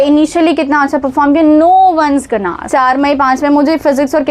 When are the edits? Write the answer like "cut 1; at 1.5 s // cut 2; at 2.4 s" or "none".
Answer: cut 1; at 2.6 s

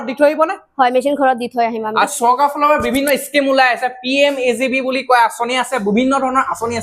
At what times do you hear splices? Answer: none

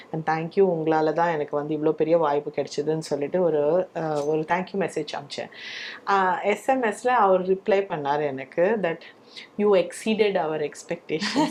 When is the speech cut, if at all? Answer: none

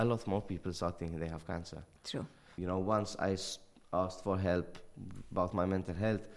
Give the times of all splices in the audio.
cut 1; at 2.5 s

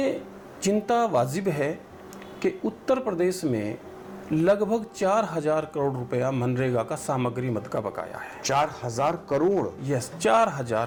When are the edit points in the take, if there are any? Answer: none

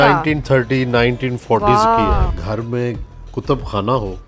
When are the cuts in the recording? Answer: cut 1; at 2.3 s

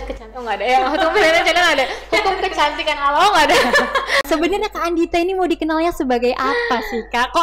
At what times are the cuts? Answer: cut 1; at 4.2 s

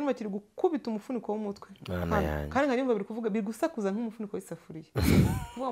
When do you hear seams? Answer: none

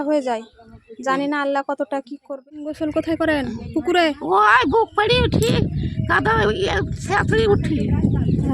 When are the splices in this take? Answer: cut 1; at 2.7 s

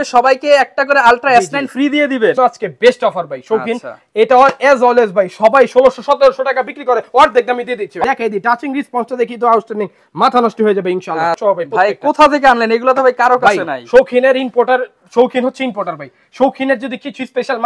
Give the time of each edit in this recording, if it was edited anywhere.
cut 1; at 2.3 s // cut 2; at 8.0 s // cut 3; at 11.4 s

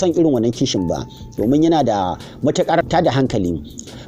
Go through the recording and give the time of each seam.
cut 1; at 2.8 s

